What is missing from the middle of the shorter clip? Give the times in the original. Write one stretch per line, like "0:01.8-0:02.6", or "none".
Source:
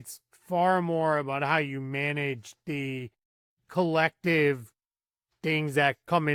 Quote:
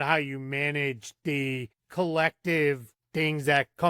0:03.2-0:03.6
0:04.7-0:05.2